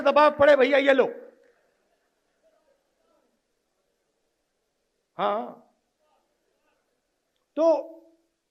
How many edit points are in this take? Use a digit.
0